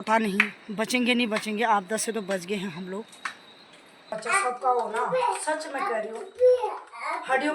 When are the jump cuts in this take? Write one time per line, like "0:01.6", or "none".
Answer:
0:04.1